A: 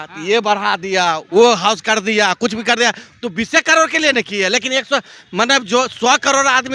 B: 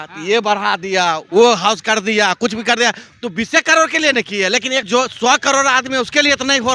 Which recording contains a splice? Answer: B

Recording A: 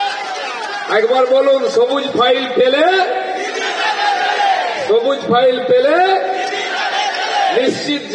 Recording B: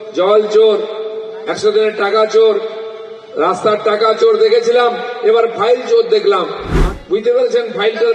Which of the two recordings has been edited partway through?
B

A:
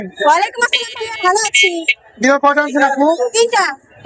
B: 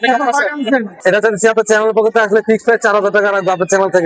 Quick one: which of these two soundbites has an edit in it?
B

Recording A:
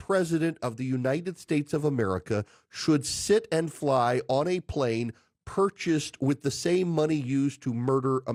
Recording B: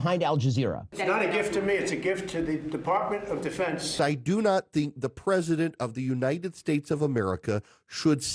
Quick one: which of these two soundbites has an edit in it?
B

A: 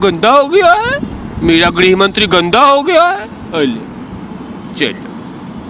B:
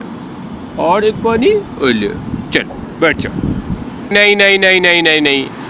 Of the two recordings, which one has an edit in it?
B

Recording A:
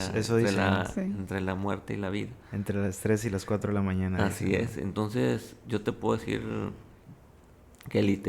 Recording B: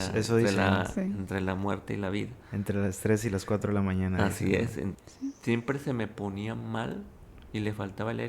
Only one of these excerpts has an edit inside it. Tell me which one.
B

